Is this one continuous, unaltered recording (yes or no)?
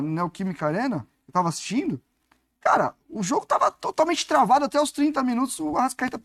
yes